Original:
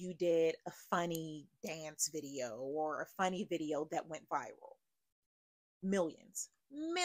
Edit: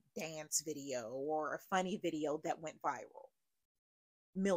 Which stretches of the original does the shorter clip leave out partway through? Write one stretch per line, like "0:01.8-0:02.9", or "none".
none